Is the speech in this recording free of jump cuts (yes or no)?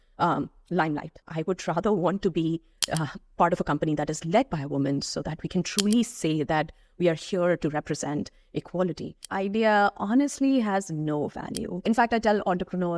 no